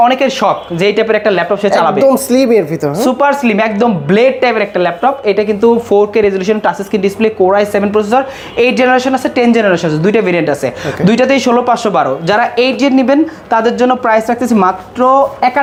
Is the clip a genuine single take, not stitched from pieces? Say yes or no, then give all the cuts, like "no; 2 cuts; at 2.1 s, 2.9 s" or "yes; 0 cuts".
yes; 0 cuts